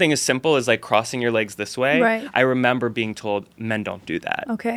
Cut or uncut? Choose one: uncut